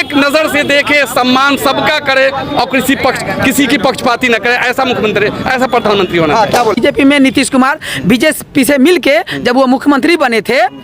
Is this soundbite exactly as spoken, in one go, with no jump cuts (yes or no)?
no